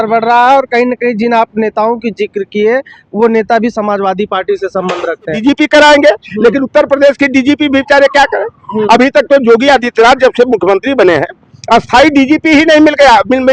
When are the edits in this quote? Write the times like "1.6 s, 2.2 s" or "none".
5.4 s